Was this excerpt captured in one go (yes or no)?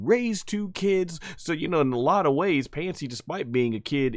yes